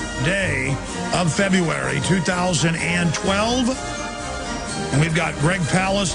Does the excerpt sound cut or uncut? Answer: uncut